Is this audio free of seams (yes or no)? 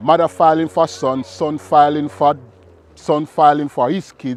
yes